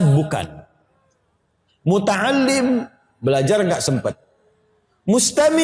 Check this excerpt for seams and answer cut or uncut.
uncut